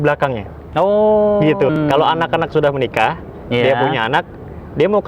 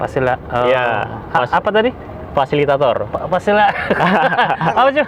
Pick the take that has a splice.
first; 1 cut; at 1.7 s

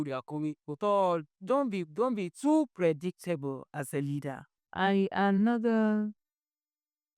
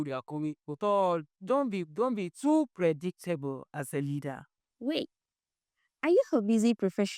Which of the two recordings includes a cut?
first; 1 cut; at 4.6 s

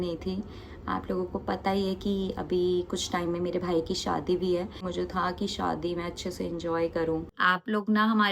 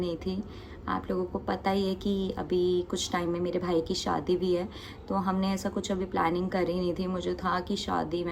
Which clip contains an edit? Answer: first; 2 cuts; at 4.9 s, 7.3 s

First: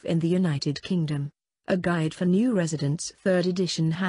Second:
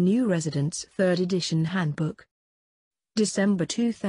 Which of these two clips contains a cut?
second; 1 cut; at 2.9 s

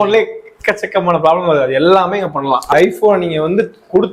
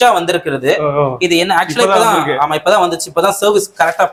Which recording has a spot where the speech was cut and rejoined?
first; 1 cut; at 2.7 s

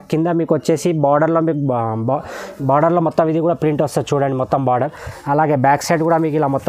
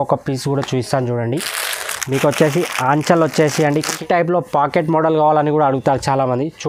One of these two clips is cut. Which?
second; 1 cut; at 4.0 s

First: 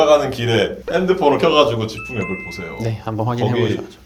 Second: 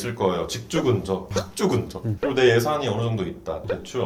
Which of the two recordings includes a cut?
second; 1 cut; at 2.1 s

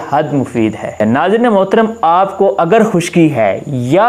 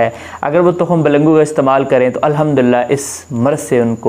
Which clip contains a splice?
first; 1 cut; at 1.0 s

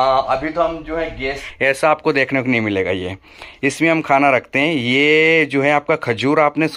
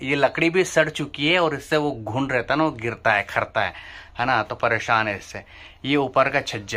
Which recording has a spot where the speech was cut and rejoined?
first; 1 cut; at 1.4 s

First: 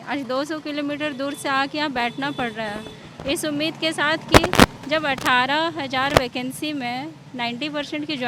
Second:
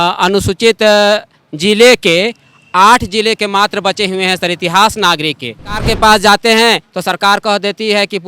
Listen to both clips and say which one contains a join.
second; 1 cut; at 5.8 s

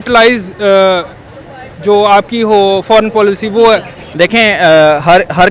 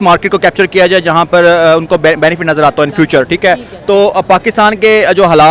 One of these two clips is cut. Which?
first; 1 cut; at 4.0 s

